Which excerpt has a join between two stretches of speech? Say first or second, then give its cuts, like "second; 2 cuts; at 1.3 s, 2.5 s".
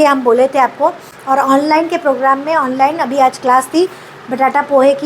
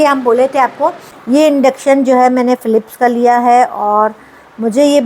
second; 1 cut; at 1.1 s